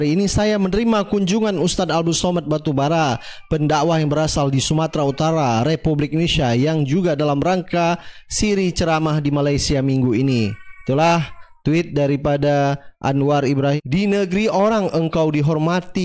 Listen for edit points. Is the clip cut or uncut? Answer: cut